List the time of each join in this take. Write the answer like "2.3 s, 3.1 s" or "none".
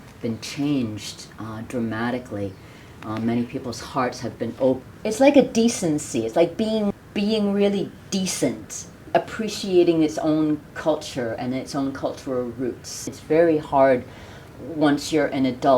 4.8 s, 6.9 s, 13.1 s

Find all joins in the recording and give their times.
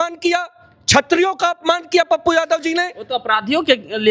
none

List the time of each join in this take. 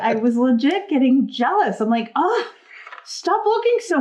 none

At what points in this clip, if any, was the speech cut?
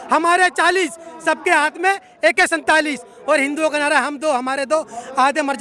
none

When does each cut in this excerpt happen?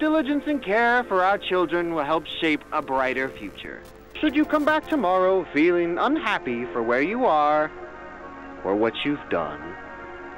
4.2 s

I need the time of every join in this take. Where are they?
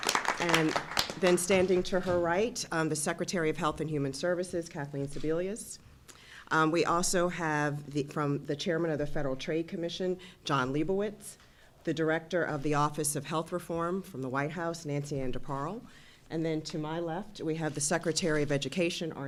none

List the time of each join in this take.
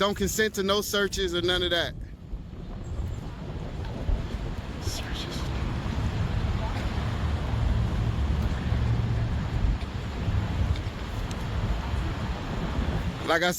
none

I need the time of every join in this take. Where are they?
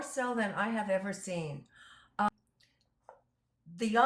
2.3 s

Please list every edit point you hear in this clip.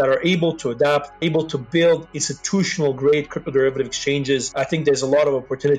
1.2 s, 4.5 s

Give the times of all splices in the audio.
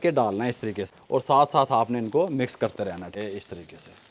0.9 s, 3.2 s

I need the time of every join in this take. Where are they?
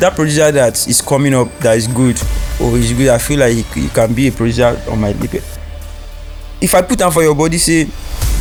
none

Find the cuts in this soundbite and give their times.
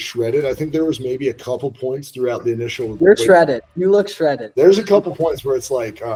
none

